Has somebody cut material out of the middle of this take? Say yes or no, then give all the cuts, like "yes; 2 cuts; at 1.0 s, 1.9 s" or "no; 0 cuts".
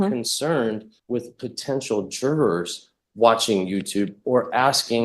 yes; 1 cut; at 0.9 s